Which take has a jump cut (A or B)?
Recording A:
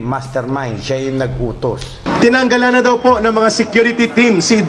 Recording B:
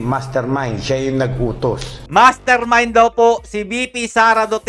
A